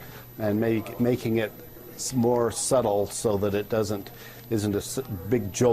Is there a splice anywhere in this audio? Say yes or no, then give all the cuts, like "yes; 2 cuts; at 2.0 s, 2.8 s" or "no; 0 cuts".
yes; 1 cut; at 2.9 s